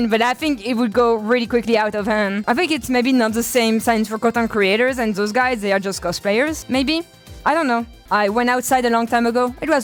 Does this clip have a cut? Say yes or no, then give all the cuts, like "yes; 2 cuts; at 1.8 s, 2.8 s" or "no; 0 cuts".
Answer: no; 0 cuts